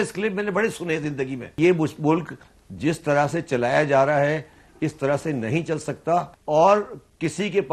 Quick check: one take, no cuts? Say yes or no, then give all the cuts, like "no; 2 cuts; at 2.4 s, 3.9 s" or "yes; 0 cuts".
no; 2 cuts; at 1.6 s, 6.4 s